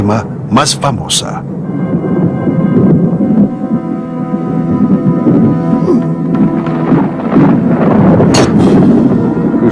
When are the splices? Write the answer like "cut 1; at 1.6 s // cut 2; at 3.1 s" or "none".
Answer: cut 1; at 5.5 s